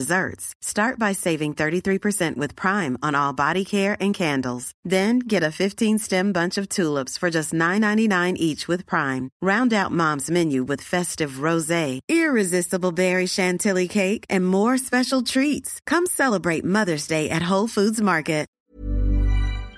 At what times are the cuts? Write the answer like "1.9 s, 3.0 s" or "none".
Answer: 18.6 s